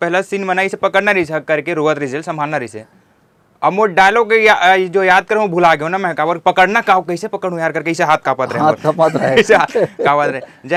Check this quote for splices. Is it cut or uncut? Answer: uncut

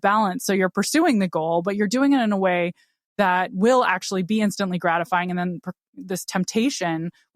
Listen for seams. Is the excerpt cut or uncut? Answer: uncut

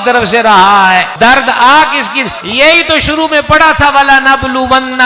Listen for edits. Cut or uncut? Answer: cut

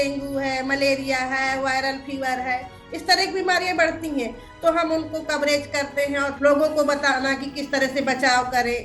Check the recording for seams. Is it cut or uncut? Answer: cut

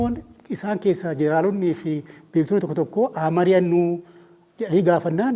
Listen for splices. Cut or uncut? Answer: uncut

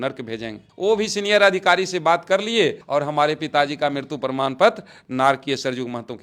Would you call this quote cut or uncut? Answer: uncut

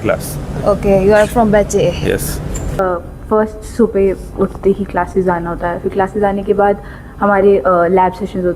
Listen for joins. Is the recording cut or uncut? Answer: cut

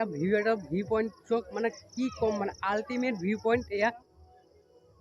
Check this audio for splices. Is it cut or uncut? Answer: cut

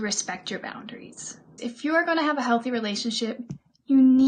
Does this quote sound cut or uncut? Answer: cut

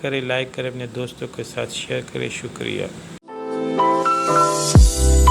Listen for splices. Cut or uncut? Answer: cut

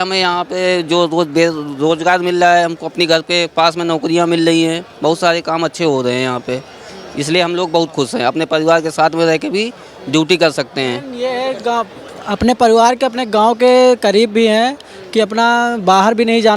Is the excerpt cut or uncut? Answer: uncut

